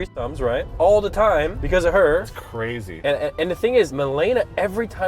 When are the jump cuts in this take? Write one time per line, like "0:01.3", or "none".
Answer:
0:02.3
0:03.9